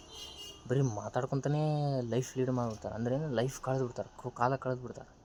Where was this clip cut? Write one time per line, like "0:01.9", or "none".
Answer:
none